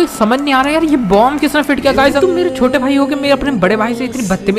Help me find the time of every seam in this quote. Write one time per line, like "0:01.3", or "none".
0:02.2